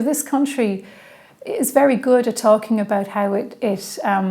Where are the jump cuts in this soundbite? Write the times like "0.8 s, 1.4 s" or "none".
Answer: none